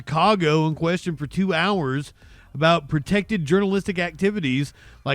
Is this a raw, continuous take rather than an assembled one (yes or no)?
yes